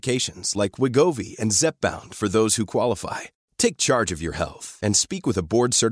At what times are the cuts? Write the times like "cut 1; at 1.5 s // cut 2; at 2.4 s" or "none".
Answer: none

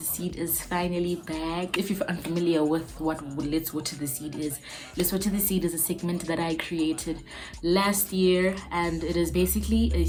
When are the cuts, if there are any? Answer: none

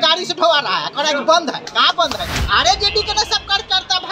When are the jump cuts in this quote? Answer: cut 1; at 2.3 s

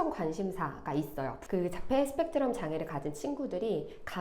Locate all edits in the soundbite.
cut 1; at 1.4 s

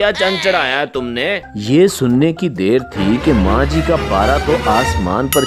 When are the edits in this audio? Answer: cut 1; at 1.4 s

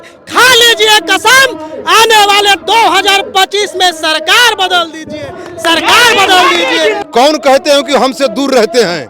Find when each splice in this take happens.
cut 1; at 7.0 s

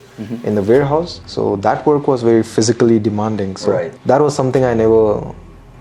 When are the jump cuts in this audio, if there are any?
cut 1; at 1.2 s // cut 2; at 3.9 s

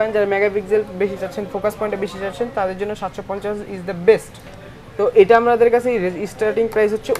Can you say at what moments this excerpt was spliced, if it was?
none

